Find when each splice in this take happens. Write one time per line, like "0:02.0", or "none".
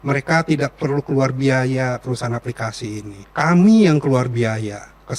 0:03.2